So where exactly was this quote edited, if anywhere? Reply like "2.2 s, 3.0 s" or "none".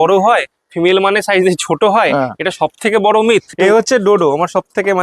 3.5 s